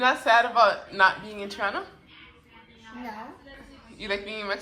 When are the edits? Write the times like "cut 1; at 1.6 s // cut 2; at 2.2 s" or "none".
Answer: none